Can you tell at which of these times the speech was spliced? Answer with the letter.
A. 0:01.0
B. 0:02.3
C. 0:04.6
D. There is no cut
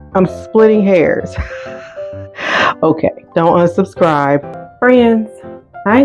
C